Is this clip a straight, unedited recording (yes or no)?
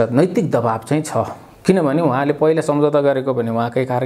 yes